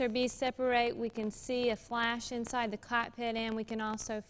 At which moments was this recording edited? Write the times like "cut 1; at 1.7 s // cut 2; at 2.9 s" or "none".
cut 1; at 1.4 s